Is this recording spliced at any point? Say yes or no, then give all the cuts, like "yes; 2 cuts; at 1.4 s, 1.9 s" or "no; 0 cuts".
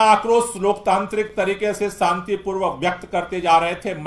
no; 0 cuts